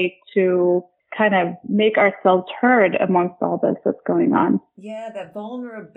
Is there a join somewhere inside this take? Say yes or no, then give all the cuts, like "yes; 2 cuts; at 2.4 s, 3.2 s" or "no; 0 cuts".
no; 0 cuts